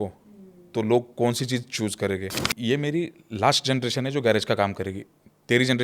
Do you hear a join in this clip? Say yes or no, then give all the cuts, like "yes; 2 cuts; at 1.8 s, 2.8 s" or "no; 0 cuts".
yes; 1 cut; at 2.5 s